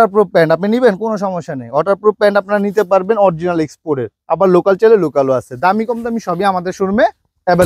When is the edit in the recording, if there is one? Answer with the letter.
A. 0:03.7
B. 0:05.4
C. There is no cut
C